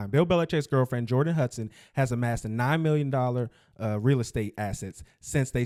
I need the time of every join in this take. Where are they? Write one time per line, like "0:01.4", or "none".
none